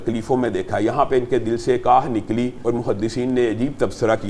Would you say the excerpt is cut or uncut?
cut